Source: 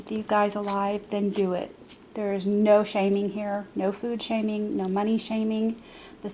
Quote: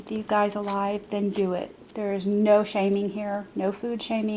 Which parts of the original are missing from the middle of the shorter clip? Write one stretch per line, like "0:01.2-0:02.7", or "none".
0:01.8-0:02.0